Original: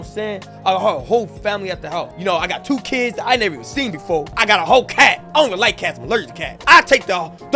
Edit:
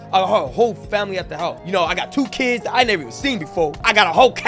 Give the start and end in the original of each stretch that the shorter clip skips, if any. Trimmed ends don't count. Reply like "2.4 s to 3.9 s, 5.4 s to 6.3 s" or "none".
none